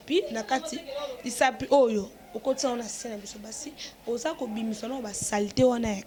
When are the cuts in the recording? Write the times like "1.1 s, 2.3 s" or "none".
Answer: none